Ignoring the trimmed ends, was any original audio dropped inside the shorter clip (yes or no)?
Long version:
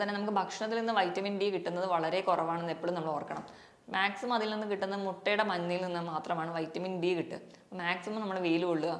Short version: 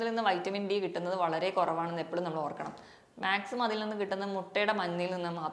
no